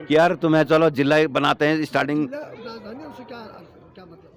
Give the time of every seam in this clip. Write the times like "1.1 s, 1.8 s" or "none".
none